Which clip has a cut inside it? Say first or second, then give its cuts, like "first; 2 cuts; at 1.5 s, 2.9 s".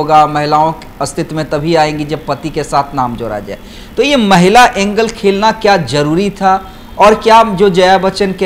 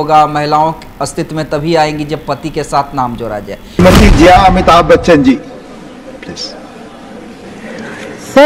second; 1 cut; at 3.6 s